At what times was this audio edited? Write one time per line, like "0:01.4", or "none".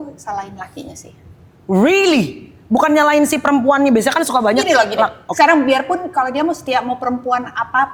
none